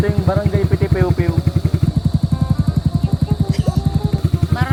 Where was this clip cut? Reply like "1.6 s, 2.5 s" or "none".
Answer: none